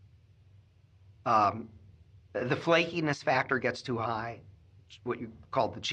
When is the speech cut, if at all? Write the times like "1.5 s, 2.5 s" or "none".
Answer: none